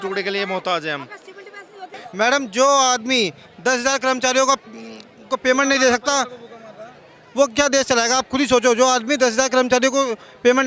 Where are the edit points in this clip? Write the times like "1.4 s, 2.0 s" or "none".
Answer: 2.0 s

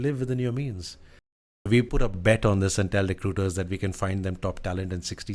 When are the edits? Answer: 1.7 s

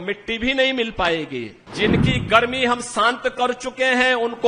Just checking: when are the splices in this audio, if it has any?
1.6 s

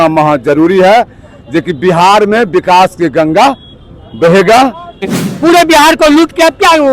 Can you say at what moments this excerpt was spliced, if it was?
5.2 s

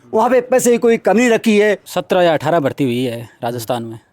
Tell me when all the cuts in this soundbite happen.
1.9 s

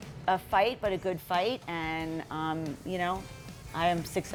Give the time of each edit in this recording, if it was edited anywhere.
none

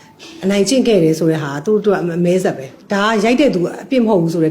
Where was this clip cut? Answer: 2.7 s

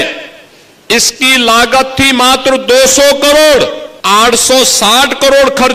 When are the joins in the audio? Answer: 3.9 s

